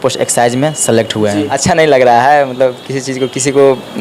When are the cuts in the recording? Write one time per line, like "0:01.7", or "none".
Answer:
0:01.5